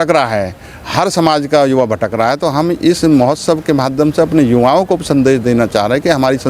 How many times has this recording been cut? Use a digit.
0